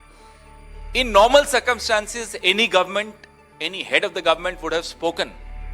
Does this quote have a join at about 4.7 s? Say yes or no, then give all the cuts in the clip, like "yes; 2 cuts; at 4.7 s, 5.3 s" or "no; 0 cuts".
no; 1 cut; at 0.9 s